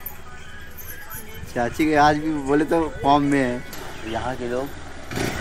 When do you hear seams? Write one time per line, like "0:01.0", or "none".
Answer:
0:03.7